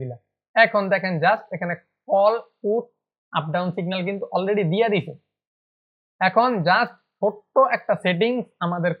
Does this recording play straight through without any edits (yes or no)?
yes